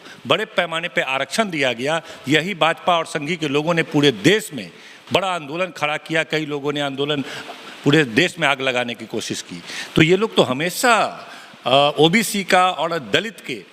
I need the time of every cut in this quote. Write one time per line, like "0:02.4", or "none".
none

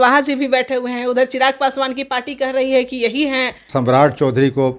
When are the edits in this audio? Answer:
0:03.6

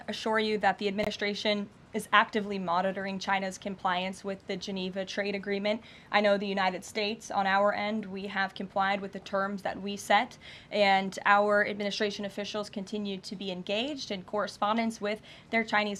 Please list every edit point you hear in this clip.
none

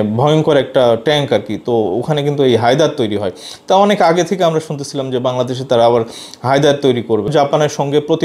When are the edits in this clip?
0:07.3

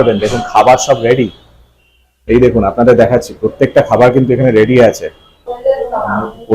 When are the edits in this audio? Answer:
0:05.5

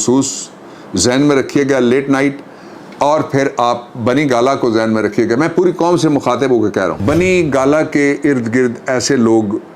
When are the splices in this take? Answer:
0:07.0

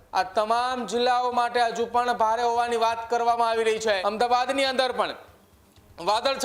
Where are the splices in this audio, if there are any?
0:04.0

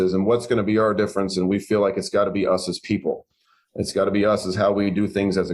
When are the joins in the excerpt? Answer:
none

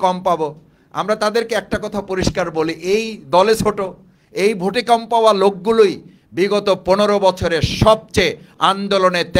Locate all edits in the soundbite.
none

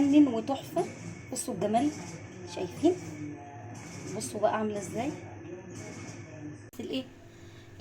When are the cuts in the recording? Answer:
0:06.7

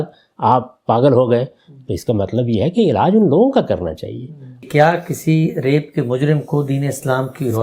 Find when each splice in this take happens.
0:04.6

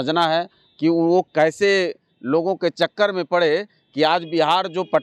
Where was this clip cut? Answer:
none

